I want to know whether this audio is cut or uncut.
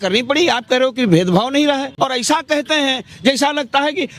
cut